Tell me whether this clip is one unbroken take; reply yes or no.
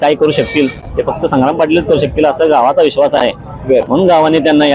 yes